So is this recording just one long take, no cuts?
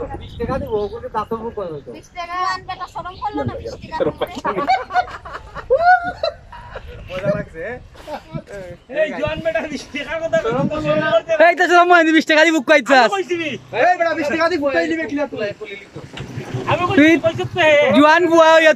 yes; 0 cuts

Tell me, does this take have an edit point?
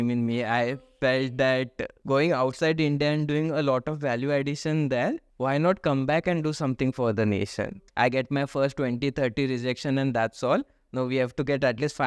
yes; 3 cuts; at 1.9 s, 5.3 s, 7.7 s

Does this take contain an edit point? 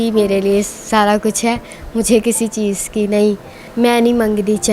yes; 1 cut; at 3.6 s

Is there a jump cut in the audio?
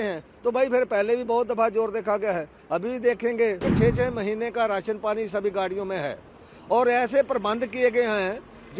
yes; 1 cut; at 3.7 s

